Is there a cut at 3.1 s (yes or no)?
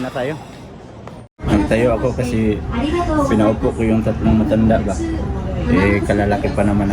no